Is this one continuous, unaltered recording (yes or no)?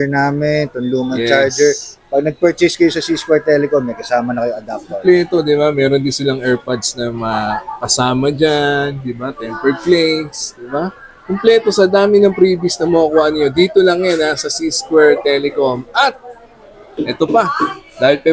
yes